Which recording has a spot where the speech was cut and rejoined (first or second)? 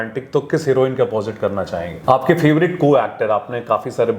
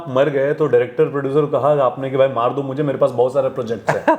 first